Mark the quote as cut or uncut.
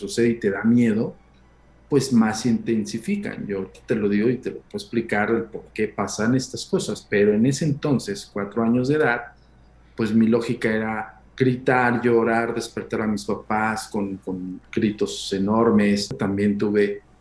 cut